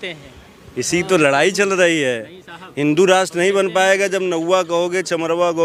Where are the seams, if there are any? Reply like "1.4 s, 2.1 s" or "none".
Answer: none